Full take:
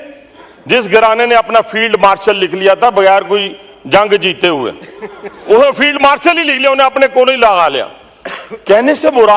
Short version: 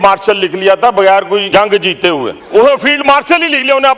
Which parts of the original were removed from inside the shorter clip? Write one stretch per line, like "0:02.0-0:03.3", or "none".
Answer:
0:03.4-0:03.8
0:04.8-0:05.3